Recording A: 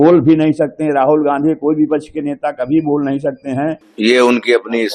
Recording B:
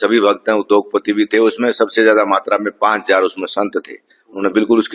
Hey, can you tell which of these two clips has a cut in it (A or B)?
A